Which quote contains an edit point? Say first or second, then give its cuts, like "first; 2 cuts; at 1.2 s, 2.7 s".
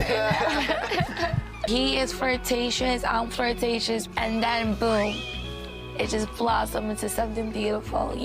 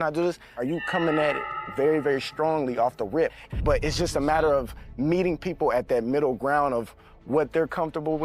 first; 1 cut; at 1.6 s